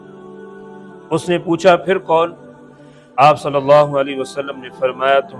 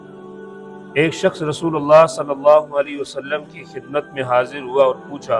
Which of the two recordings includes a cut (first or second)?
second